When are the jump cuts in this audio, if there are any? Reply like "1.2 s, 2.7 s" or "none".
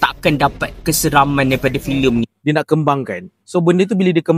2.3 s